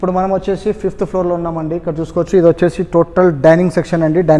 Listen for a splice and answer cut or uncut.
uncut